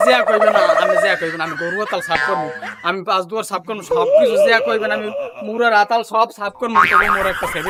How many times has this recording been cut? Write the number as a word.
zero